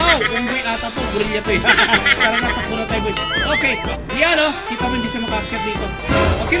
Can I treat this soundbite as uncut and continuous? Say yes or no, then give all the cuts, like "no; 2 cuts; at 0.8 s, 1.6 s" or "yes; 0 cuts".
yes; 0 cuts